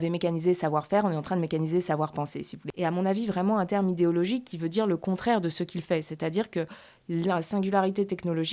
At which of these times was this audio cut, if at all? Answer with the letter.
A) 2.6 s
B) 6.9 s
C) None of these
A